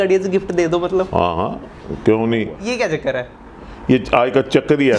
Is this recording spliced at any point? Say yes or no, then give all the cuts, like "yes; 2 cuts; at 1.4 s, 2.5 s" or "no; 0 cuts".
yes; 1 cut; at 2.6 s